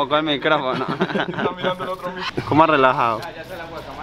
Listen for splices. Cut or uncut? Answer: cut